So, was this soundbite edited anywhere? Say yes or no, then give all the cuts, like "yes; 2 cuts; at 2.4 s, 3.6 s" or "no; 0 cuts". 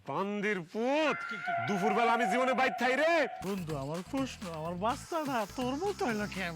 yes; 1 cut; at 3.4 s